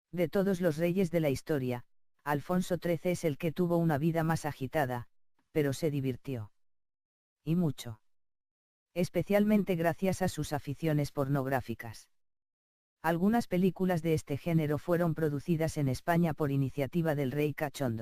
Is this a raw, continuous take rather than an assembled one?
no; 1 cut; at 14.5 s

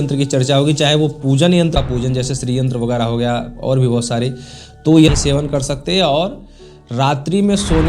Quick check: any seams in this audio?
yes; 2 cuts; at 1.7 s, 5.1 s

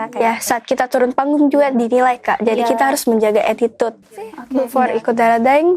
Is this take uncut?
no; 1 cut; at 4.4 s

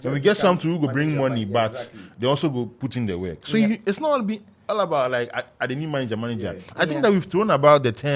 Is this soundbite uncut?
yes; 0 cuts

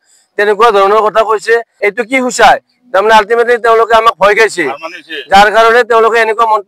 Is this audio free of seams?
no; 1 cut; at 1.7 s

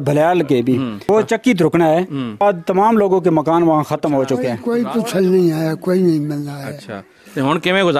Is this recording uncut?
no; 3 cuts; at 1.0 s, 2.4 s, 4.6 s

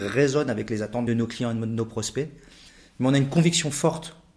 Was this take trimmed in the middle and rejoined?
yes; 1 cut; at 1.1 s

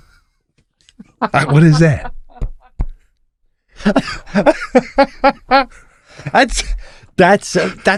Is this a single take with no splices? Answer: yes; 0 cuts

